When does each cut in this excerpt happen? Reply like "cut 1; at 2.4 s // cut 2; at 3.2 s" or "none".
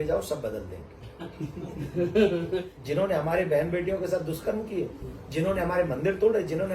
cut 1; at 2.7 s